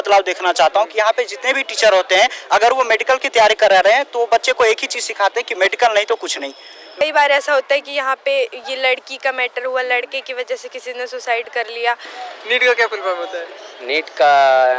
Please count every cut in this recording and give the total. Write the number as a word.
two